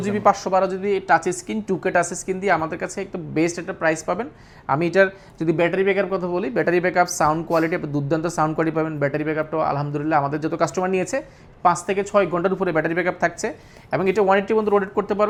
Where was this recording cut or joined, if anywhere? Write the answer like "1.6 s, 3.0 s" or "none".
none